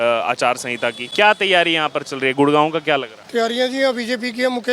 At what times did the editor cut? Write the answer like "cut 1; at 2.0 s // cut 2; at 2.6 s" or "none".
cut 1; at 1.0 s // cut 2; at 3.2 s